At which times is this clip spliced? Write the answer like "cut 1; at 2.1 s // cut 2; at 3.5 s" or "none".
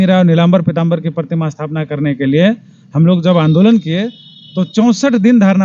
none